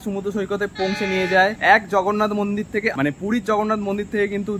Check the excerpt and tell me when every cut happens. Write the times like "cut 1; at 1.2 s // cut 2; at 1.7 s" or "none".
cut 1; at 1.6 s // cut 2; at 2.9 s